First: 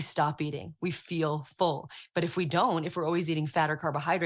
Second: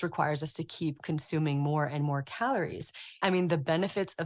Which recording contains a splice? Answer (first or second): second